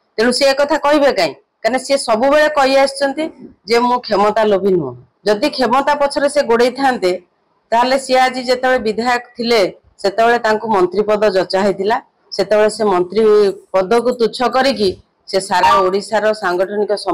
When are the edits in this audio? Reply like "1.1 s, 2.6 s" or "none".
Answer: 5.0 s